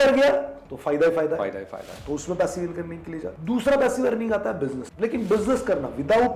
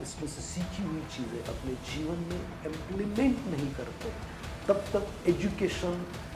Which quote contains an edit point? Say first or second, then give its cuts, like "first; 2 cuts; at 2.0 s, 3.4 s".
first; 2 cuts; at 3.3 s, 4.8 s